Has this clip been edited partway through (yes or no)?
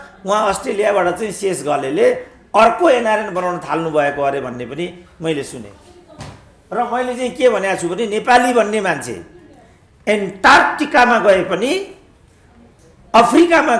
no